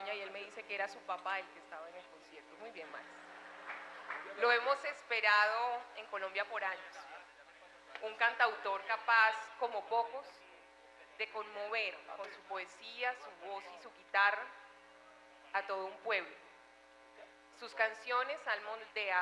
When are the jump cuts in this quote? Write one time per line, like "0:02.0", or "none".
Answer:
none